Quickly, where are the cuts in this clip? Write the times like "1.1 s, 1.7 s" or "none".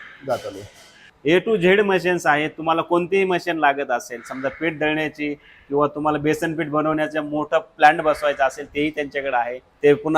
1.0 s

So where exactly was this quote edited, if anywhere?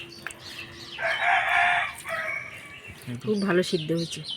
3.2 s

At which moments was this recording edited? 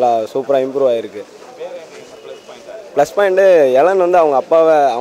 none

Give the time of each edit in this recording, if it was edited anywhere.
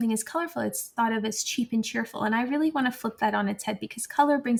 none

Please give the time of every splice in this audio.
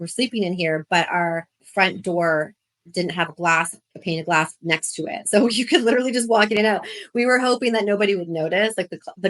1.6 s

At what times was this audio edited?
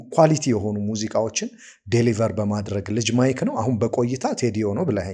none

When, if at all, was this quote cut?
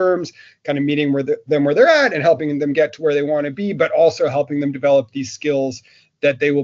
none

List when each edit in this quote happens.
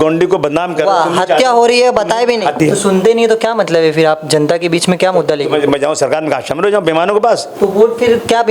2.6 s, 7.5 s

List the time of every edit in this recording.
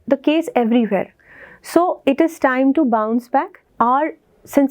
3.7 s

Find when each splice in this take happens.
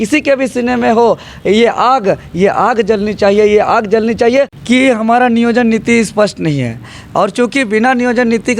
4.6 s

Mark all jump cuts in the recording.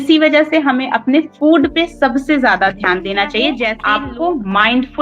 3.8 s

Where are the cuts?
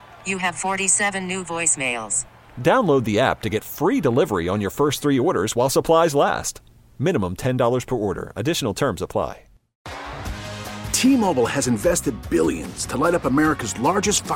9.8 s

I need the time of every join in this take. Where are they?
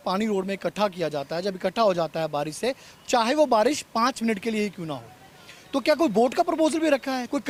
none

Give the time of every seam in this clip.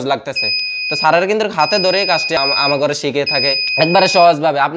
2.4 s, 3.6 s

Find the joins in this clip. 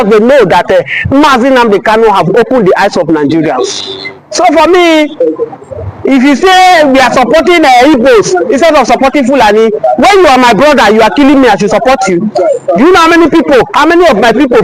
none

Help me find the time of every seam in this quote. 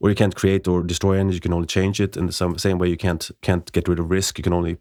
none

